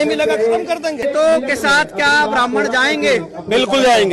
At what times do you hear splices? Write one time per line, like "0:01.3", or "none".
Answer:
0:01.0